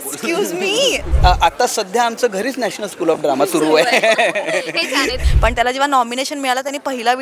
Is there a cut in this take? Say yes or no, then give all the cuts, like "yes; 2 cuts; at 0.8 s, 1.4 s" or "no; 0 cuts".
yes; 2 cuts; at 1.1 s, 5.2 s